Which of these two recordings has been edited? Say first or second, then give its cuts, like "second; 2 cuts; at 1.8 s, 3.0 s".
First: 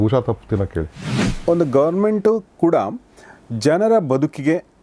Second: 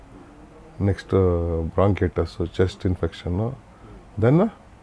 first; 1 cut; at 1.3 s